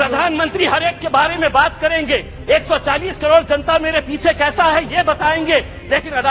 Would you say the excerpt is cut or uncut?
uncut